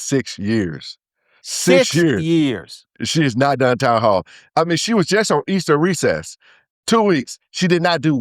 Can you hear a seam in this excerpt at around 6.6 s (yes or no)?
yes